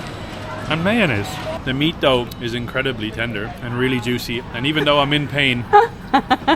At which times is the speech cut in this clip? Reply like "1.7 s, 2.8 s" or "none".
1.6 s, 2.3 s, 3.6 s